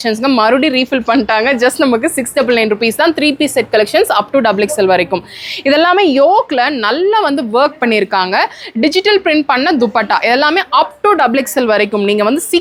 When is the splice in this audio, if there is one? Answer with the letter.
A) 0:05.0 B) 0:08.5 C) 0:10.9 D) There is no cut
D